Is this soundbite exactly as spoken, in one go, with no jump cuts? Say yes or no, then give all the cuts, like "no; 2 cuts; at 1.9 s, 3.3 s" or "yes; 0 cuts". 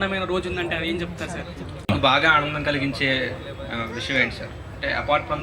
no; 1 cut; at 1.9 s